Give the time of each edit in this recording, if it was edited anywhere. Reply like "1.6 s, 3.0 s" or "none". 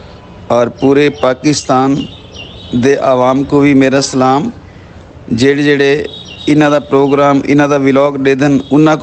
none